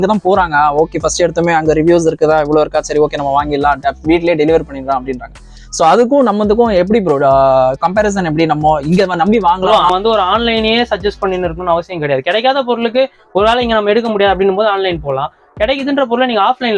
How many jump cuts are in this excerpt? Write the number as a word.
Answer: one